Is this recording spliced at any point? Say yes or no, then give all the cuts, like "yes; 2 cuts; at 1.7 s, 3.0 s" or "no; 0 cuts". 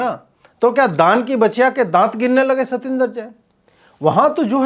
no; 0 cuts